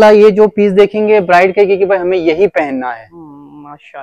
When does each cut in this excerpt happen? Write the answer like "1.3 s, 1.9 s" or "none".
none

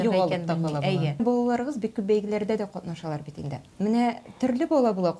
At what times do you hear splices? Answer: 1.2 s

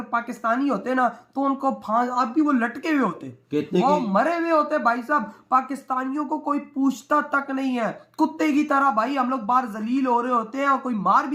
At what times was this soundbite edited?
none

